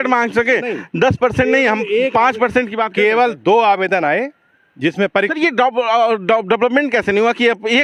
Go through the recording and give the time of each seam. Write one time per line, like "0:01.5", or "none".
none

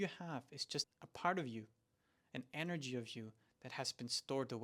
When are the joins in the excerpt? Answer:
0:01.0

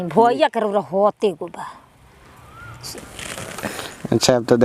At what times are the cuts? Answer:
0:02.8

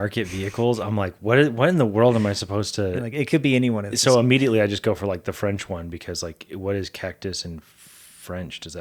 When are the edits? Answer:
none

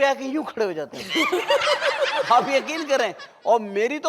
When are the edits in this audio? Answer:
none

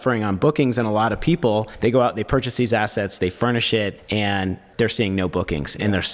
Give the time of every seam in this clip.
0:01.7
0:04.0

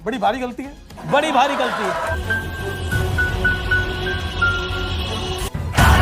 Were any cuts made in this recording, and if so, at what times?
0:02.1

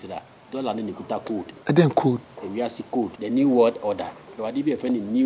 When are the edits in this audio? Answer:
0:01.5
0:03.2

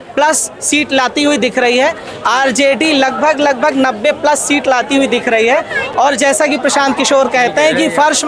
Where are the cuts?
none

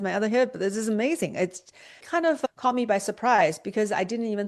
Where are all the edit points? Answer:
none

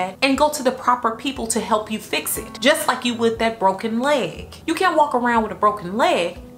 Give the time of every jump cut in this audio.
none

